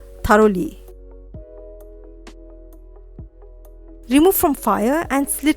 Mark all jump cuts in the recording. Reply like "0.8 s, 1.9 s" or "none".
none